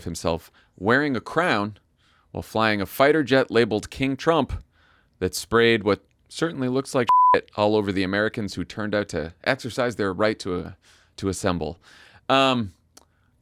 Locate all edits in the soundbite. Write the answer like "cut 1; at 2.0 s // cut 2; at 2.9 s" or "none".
none